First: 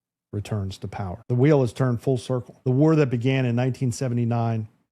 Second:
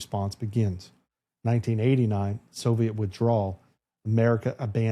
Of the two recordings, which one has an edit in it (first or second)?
first